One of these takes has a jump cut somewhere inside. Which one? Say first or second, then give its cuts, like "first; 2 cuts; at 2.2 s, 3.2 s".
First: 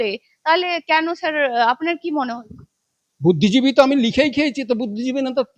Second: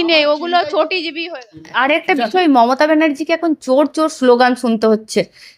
second; 1 cut; at 1.7 s